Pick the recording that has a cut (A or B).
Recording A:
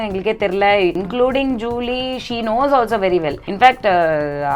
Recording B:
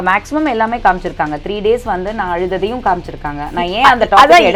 A